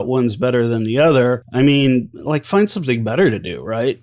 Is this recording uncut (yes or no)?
no